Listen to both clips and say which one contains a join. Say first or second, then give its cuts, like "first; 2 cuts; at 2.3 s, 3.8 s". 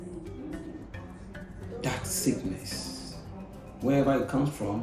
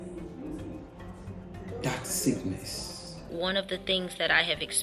second; 1 cut; at 3.2 s